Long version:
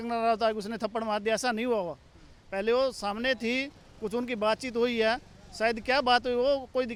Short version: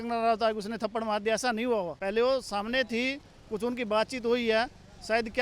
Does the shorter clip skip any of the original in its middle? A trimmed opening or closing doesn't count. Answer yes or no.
yes